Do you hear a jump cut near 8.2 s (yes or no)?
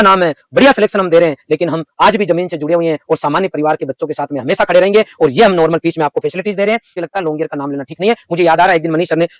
no